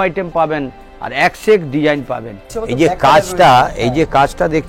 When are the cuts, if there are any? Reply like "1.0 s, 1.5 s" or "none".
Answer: 2.6 s